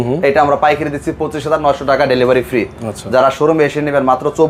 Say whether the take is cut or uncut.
uncut